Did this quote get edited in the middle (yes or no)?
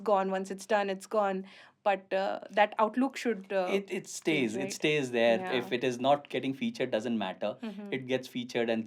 no